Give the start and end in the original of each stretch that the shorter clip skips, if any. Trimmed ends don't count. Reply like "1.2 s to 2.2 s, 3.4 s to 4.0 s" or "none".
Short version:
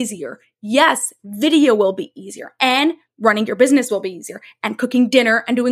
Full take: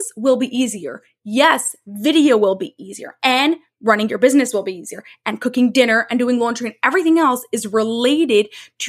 none